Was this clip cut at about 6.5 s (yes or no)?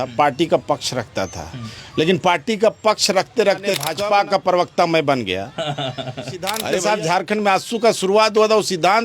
yes